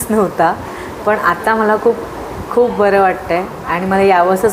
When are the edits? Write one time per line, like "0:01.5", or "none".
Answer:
none